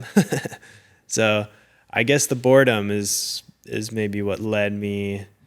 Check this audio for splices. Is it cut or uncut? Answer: uncut